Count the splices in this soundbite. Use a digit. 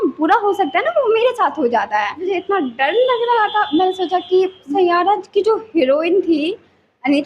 2